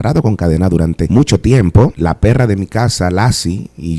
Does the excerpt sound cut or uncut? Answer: cut